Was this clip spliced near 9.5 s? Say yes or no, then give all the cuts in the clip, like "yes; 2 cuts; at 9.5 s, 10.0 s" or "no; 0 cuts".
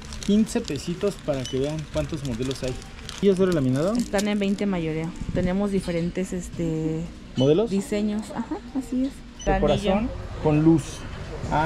yes; 2 cuts; at 3.2 s, 9.5 s